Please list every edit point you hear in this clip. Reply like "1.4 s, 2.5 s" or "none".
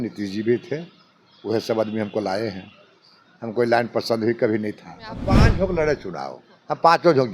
5.4 s